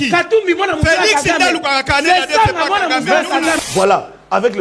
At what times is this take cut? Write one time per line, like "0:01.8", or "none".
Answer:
0:03.6